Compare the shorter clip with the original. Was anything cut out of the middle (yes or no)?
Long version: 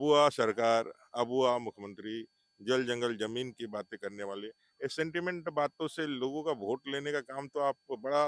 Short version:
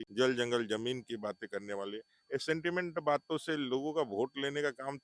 no